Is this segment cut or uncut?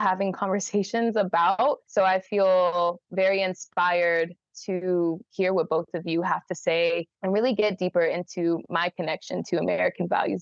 cut